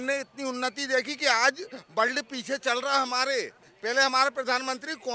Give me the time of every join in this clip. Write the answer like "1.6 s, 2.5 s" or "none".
3.7 s